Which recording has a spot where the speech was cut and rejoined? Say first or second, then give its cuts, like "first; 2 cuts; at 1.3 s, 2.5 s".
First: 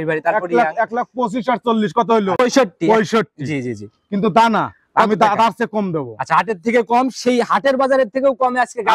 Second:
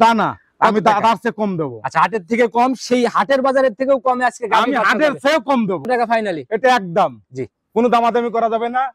second; 1 cut; at 5.9 s